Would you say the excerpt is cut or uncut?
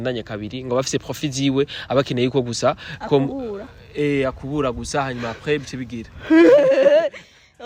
uncut